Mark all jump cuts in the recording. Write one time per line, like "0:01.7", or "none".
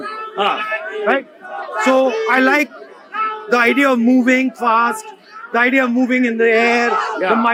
none